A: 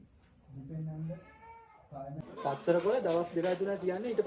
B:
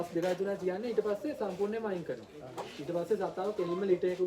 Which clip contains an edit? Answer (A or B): A